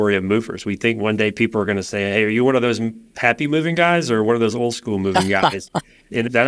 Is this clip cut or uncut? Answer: uncut